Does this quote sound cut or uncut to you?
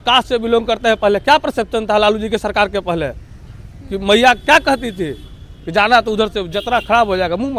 uncut